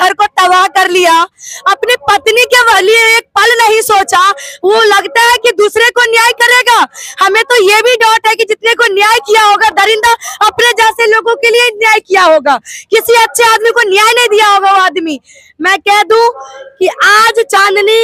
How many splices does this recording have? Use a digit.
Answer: 0